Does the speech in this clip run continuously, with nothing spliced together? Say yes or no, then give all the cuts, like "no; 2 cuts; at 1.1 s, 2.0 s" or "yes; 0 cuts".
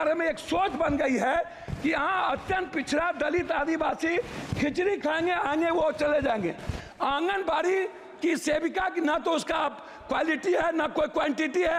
yes; 0 cuts